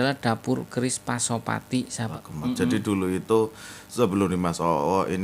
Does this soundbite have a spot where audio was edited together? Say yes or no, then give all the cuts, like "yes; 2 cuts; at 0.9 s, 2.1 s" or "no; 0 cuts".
yes; 1 cut; at 2.1 s